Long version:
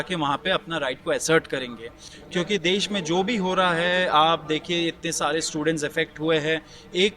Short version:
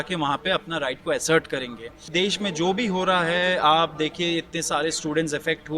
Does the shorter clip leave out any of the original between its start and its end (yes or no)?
yes